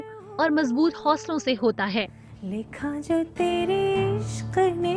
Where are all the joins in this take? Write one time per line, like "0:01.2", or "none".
0:02.2